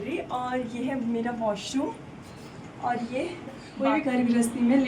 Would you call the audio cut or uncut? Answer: cut